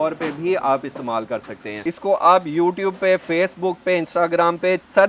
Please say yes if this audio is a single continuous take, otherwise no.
no